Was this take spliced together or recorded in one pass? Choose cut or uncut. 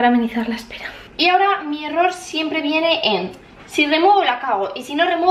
cut